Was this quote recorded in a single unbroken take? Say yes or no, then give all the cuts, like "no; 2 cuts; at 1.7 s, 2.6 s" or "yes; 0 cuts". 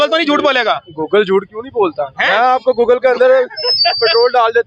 yes; 0 cuts